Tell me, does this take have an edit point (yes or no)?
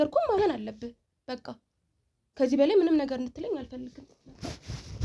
no